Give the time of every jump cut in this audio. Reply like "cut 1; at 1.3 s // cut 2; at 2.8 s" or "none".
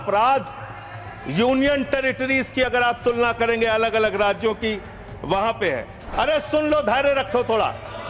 cut 1; at 6.0 s